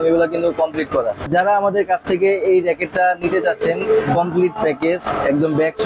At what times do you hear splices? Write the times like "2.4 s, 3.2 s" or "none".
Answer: 1.3 s